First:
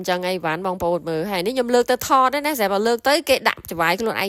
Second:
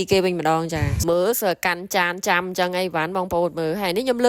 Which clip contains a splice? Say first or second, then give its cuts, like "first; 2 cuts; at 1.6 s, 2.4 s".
second; 1 cut; at 0.9 s